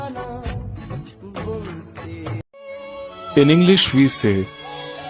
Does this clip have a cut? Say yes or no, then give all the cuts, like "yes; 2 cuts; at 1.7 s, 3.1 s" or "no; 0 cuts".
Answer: yes; 1 cut; at 2.5 s